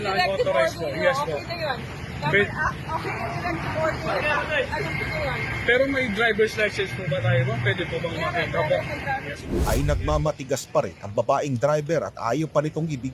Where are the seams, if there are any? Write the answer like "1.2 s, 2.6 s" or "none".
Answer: 9.5 s